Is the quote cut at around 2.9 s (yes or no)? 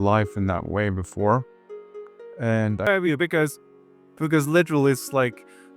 yes